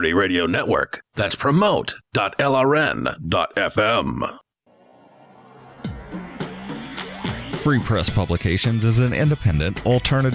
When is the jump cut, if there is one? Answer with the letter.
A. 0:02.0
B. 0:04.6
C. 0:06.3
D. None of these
B